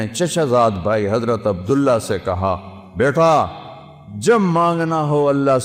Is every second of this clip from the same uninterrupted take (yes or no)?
yes